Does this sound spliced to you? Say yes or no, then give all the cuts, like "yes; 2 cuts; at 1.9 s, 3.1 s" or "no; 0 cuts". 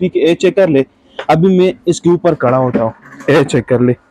no; 0 cuts